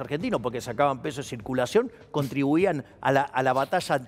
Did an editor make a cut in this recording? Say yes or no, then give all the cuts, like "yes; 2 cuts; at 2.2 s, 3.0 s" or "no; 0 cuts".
no; 0 cuts